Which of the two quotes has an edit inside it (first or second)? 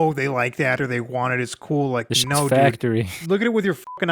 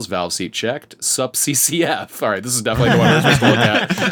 first